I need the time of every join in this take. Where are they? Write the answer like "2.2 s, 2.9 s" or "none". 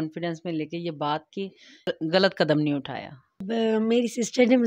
2.1 s, 3.3 s

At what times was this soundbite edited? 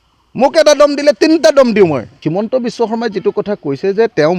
2.1 s

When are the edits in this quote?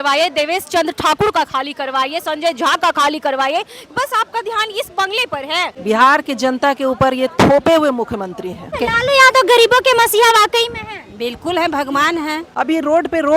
5.7 s, 8.7 s, 12.4 s

